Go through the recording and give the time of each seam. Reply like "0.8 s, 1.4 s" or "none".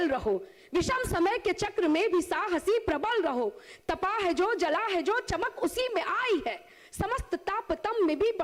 none